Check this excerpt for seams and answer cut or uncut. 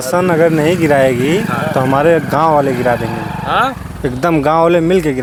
uncut